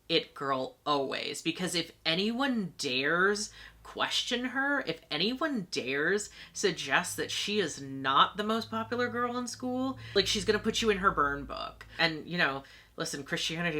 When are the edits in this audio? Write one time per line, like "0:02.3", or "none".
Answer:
0:10.1
0:11.9